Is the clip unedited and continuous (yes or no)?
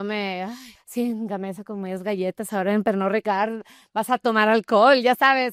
yes